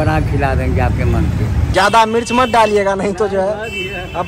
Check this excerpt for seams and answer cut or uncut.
uncut